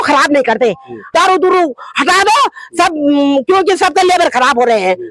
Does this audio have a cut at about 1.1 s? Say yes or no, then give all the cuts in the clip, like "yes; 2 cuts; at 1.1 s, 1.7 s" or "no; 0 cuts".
yes; 1 cut; at 1.1 s